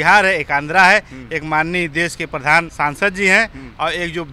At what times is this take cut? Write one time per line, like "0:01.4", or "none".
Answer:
0:02.7